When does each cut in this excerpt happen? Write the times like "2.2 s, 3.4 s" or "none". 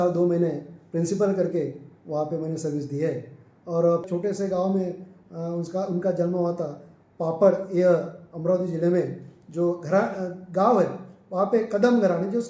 4.1 s

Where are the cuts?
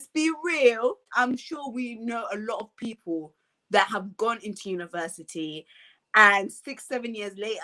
1.1 s

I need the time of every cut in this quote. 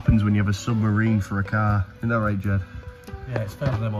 1.9 s

